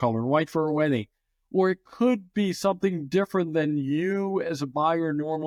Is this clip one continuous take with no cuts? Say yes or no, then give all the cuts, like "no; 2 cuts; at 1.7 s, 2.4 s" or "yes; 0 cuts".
yes; 0 cuts